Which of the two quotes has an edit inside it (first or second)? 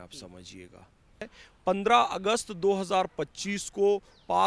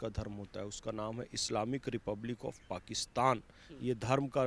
first